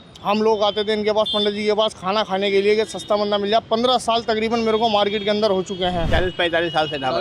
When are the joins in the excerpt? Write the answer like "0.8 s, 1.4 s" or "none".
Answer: 6.1 s